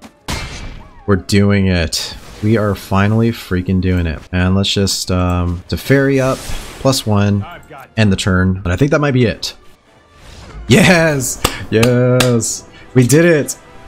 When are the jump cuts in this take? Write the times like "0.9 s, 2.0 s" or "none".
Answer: 4.2 s, 8.6 s